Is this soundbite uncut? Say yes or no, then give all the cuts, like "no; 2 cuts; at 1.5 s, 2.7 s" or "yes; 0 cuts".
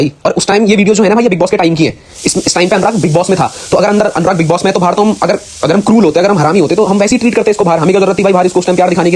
yes; 0 cuts